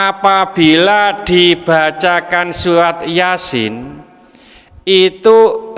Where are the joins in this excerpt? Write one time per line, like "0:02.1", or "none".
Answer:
none

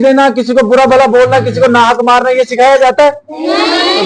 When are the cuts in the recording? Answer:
none

